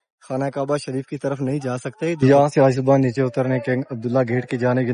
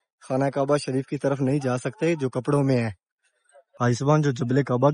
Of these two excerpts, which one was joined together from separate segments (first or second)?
first